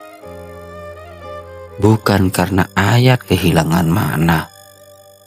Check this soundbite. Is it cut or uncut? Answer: uncut